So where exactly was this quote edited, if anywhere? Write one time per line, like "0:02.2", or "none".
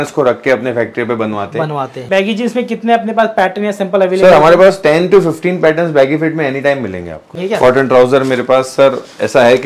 0:02.0
0:07.4